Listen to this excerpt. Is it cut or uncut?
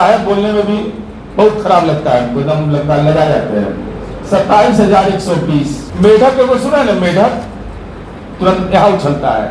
cut